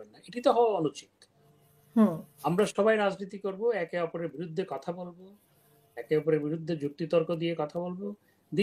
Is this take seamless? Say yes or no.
yes